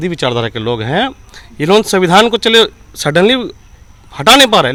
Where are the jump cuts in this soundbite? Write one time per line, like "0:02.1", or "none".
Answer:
none